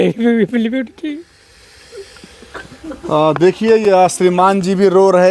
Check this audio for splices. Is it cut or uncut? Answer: uncut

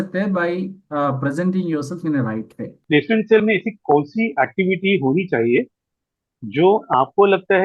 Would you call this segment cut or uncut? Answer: cut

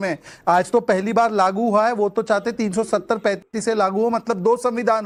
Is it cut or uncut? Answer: uncut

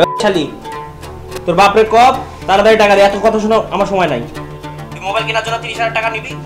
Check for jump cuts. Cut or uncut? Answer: uncut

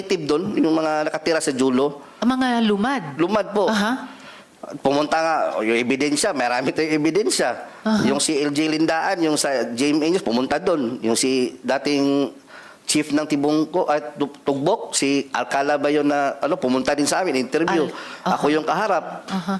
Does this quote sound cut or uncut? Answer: uncut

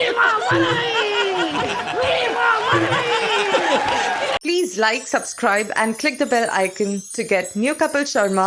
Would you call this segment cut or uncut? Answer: cut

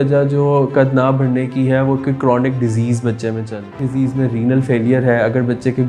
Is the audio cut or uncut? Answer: cut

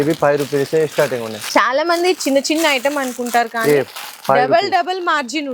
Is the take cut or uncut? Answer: cut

